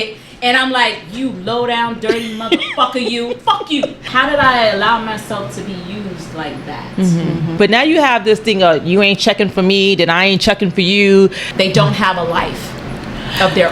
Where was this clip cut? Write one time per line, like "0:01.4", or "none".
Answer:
0:04.0
0:07.6
0:11.4